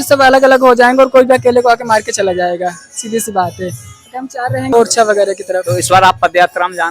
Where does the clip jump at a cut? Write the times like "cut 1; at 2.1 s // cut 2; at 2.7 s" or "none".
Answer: cut 1; at 4.7 s